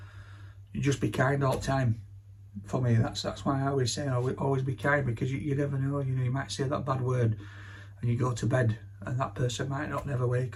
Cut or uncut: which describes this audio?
uncut